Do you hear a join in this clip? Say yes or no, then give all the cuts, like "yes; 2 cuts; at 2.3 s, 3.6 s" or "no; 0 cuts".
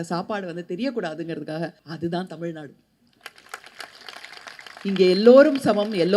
yes; 1 cut; at 1.8 s